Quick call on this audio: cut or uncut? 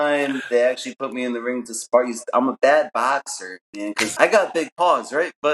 cut